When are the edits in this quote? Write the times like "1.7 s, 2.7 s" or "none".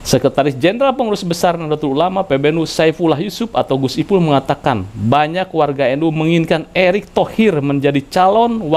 none